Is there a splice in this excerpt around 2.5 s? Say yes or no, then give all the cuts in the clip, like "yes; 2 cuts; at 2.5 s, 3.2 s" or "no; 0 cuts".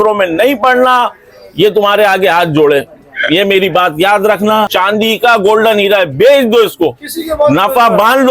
no; 1 cut; at 4.7 s